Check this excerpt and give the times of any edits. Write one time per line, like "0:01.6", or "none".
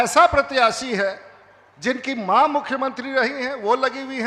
none